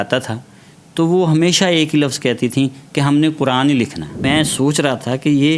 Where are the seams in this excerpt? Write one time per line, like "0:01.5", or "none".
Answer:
0:04.3